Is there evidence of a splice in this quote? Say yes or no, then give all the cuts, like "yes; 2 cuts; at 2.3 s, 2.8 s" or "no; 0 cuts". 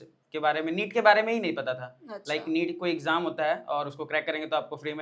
no; 0 cuts